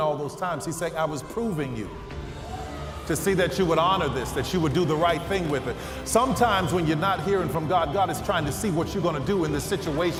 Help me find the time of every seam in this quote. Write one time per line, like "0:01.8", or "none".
none